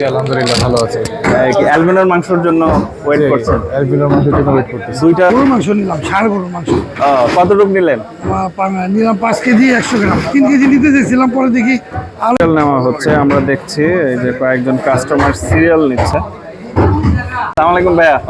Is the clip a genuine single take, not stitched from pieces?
no; 3 cuts; at 5.3 s, 12.4 s, 17.5 s

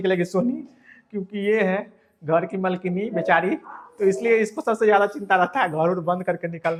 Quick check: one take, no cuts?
yes; 0 cuts

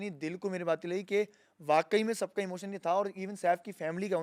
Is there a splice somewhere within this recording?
no; 0 cuts

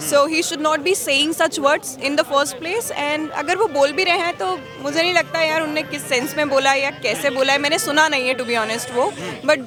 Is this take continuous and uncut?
yes; 0 cuts

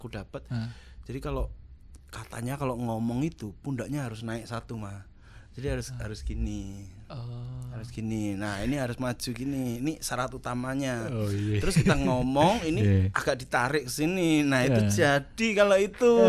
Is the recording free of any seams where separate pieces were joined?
yes; 0 cuts

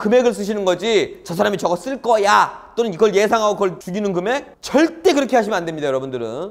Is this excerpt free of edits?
no; 1 cut; at 4.2 s

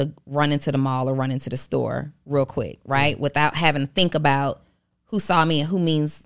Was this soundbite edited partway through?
no; 0 cuts

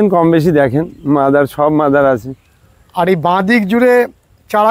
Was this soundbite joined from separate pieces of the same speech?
no; 0 cuts

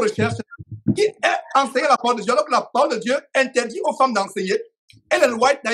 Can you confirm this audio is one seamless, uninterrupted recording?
yes; 0 cuts

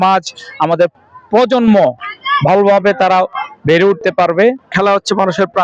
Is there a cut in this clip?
yes; 1 cut; at 4.7 s

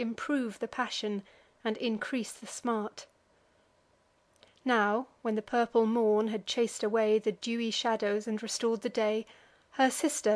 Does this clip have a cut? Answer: yes; 1 cut; at 7.2 s

